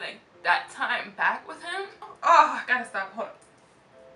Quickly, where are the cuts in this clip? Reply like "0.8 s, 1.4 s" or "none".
2.1 s